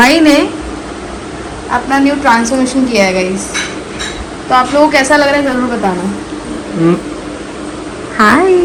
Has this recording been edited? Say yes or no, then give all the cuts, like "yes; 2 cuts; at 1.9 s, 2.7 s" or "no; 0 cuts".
no; 0 cuts